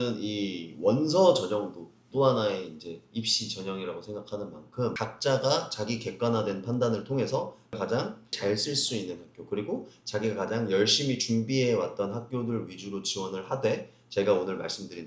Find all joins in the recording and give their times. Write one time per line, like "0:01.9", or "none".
none